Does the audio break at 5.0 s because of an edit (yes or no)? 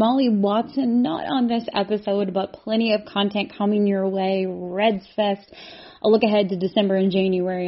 no